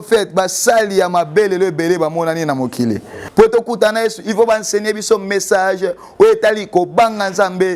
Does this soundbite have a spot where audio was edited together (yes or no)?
yes